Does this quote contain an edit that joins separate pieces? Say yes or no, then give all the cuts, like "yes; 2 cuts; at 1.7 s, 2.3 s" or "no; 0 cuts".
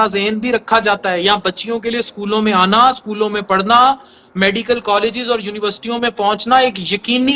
no; 0 cuts